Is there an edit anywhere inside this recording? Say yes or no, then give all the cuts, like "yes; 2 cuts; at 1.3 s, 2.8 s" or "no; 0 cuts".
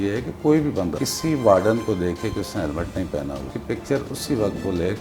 yes; 2 cuts; at 0.9 s, 3.5 s